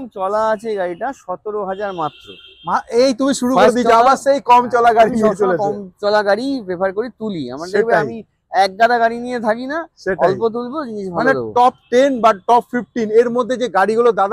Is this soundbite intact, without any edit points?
yes; 0 cuts

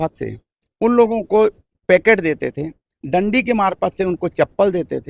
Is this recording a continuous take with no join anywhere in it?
yes; 0 cuts

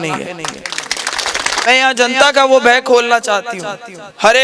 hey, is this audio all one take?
no; 1 cut; at 1.7 s

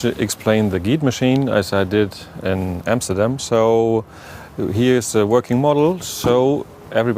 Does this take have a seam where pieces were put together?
yes; 1 cut; at 3.4 s

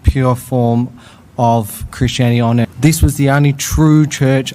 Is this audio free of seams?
no; 1 cut; at 2.6 s

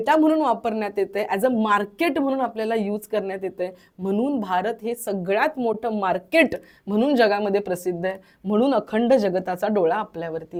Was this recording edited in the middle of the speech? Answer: no; 0 cuts

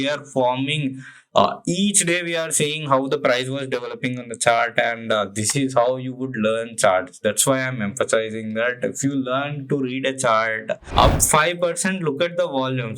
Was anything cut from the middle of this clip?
yes; 1 cut; at 10.8 s

